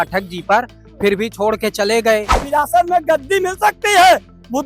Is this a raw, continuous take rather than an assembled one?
no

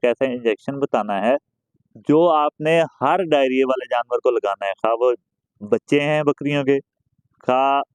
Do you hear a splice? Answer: no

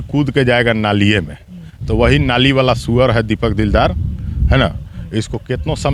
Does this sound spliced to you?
no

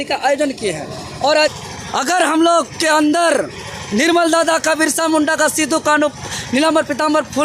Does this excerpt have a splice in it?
yes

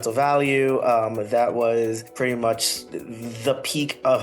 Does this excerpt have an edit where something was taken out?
yes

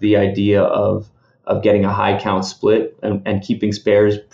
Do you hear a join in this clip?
no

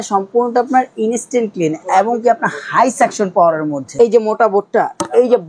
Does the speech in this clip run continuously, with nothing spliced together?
no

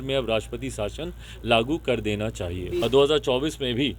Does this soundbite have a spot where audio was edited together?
yes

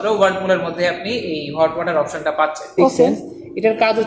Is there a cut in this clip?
yes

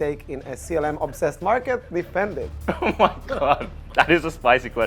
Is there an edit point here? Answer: no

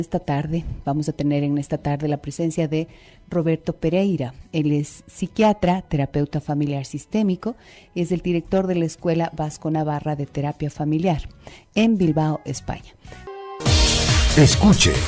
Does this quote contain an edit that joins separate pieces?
no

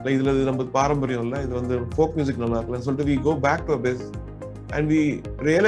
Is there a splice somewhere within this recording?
no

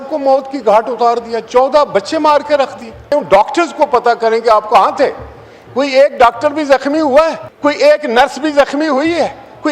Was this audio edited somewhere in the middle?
yes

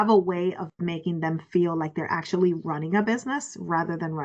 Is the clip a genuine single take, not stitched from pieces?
yes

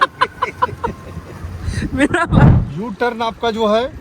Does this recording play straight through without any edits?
no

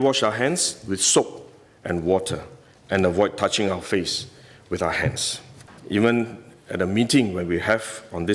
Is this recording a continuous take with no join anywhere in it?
no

